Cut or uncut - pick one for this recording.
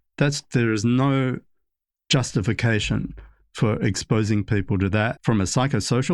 cut